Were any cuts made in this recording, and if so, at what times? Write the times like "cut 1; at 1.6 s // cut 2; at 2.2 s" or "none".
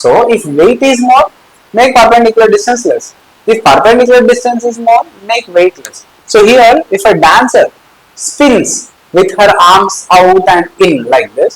cut 1; at 6.1 s